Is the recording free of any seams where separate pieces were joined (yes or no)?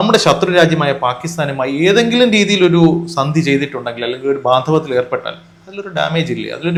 yes